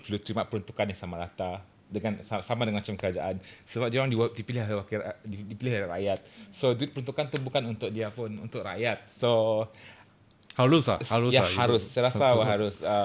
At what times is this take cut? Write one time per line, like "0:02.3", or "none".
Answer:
none